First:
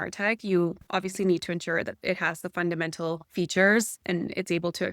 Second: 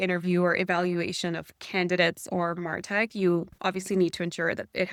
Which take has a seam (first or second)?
first